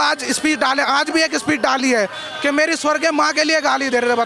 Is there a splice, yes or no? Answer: no